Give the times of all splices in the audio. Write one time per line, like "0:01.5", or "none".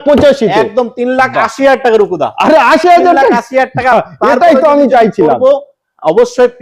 none